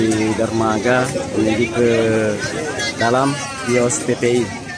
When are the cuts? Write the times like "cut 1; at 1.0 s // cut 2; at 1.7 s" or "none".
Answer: none

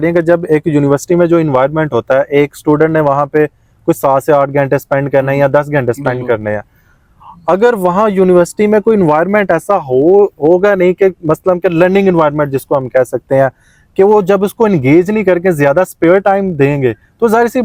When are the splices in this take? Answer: none

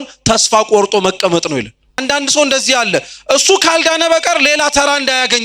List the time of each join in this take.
cut 1; at 2.0 s

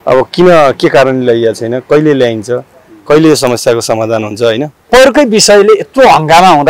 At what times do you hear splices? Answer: cut 1; at 4.9 s

